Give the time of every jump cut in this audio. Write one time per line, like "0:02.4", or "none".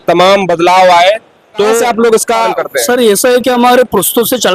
none